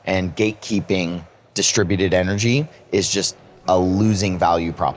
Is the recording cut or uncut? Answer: uncut